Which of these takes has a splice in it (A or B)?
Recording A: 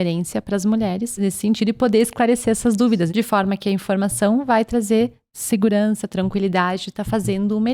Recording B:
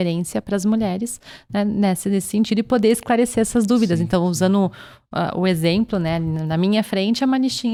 A